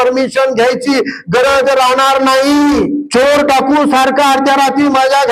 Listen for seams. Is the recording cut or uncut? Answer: cut